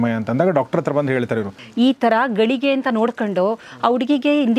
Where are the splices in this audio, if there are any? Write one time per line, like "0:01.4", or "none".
0:01.6